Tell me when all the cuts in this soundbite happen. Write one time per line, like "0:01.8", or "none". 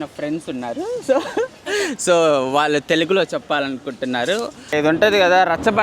0:04.7